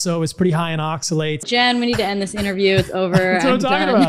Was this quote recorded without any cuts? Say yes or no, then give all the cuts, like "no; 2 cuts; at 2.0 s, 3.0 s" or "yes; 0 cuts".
no; 1 cut; at 1.5 s